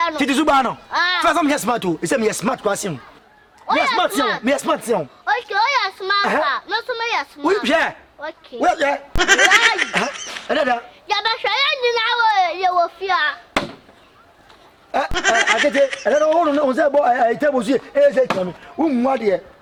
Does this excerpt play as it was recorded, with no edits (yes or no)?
yes